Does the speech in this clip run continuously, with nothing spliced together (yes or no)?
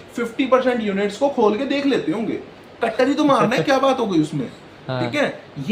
yes